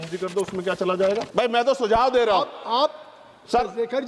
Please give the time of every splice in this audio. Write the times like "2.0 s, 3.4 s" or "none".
1.3 s